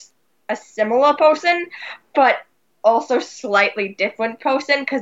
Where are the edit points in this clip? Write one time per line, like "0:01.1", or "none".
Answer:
none